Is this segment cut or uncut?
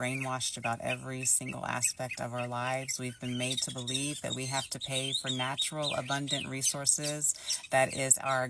uncut